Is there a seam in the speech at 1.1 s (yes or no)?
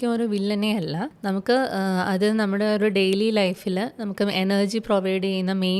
yes